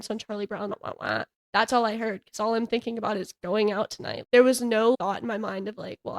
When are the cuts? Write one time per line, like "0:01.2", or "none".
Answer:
0:05.0